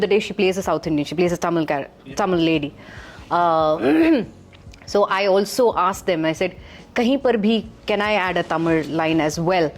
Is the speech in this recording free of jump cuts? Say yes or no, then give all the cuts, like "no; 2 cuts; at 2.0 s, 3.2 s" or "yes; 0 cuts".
yes; 0 cuts